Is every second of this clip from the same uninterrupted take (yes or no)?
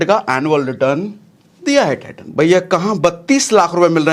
no